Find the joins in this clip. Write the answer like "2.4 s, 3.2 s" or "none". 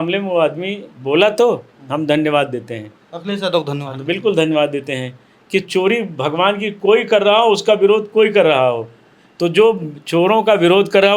none